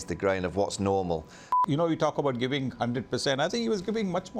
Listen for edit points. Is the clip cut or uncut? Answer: cut